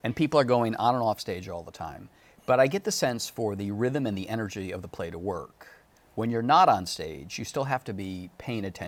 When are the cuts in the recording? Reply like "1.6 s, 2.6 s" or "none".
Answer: none